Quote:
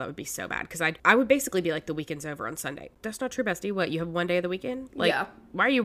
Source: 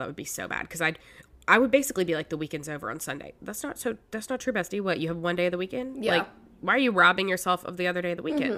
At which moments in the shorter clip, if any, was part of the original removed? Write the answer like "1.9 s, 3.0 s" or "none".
1.0 s, 2.9 s